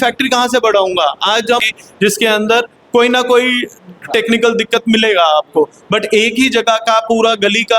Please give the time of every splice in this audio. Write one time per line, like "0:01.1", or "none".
0:01.6